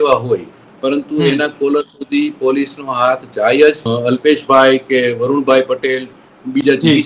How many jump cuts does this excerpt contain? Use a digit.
1